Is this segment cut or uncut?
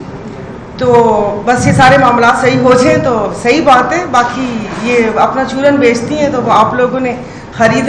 uncut